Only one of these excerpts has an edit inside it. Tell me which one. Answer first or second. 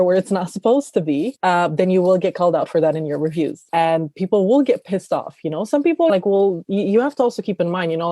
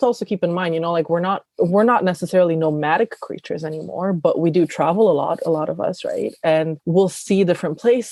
first